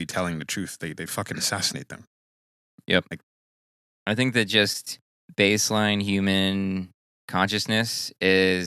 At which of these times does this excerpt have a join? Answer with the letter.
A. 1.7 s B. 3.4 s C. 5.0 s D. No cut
B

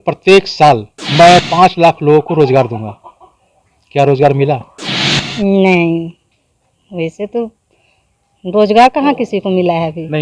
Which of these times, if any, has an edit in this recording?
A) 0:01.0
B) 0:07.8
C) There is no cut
A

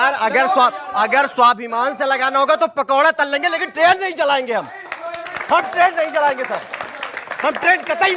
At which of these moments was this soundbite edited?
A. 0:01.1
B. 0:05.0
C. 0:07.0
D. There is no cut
B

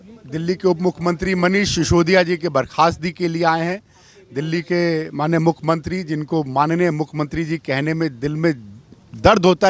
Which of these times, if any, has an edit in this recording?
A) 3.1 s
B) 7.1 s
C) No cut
C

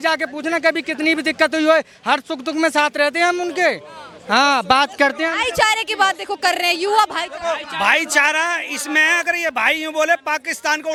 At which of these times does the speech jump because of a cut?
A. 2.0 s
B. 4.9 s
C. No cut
C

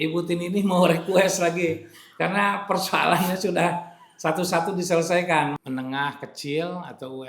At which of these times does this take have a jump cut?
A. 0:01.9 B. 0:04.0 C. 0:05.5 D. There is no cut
C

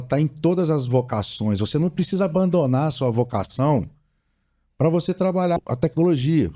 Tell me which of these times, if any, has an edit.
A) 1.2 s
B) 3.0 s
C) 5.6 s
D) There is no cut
C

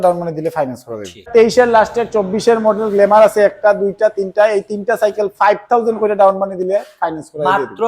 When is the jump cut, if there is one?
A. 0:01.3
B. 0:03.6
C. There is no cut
A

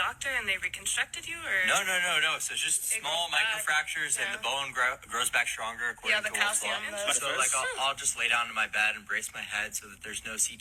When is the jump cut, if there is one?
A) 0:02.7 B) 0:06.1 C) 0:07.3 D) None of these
D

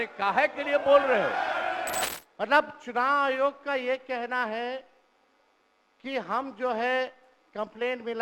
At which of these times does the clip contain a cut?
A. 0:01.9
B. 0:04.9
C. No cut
A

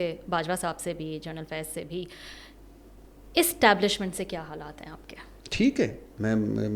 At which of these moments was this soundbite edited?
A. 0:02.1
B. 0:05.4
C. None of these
C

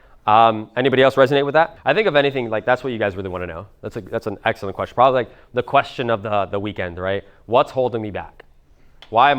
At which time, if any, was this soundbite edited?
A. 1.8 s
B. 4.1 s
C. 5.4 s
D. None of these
A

